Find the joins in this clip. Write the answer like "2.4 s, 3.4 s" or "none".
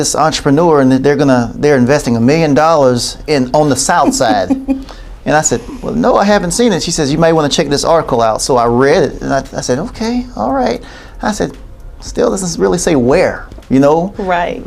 none